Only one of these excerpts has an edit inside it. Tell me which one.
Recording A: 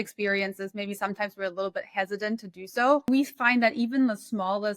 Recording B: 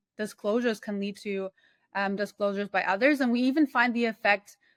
A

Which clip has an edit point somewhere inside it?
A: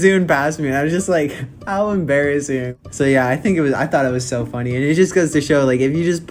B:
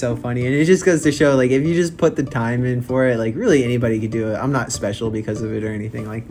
A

